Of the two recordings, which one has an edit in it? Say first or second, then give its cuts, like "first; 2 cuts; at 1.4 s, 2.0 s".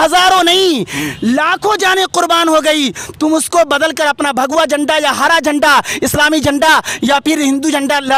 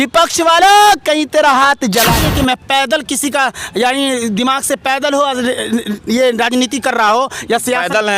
second; 1 cut; at 2.3 s